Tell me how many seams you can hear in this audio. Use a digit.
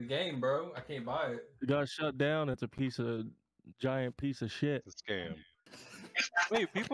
1